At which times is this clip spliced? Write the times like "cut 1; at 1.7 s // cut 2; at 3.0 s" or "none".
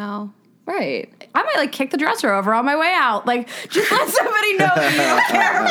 cut 1; at 1.2 s